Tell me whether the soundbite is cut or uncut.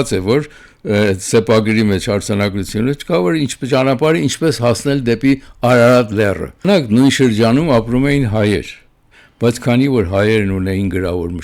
cut